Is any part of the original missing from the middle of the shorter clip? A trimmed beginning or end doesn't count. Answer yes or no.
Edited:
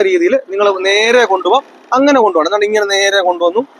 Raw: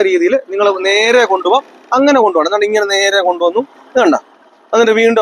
no